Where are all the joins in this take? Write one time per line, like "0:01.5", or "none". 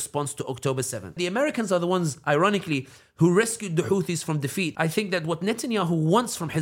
0:01.2
0:04.7